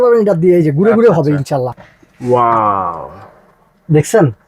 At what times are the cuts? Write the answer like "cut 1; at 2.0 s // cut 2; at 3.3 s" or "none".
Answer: cut 1; at 1.8 s